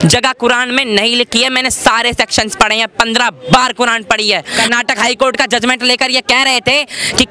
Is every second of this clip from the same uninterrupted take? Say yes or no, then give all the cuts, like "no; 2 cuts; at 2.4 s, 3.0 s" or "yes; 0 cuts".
no; 1 cut; at 4.6 s